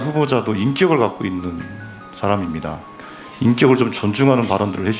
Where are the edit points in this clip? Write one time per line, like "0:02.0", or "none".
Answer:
0:02.9